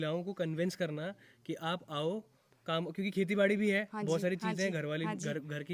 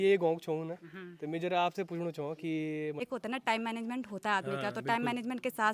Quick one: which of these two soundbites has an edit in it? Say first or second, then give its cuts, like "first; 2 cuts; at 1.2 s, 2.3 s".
second; 1 cut; at 3.0 s